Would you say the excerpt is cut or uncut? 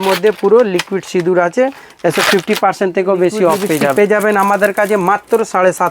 cut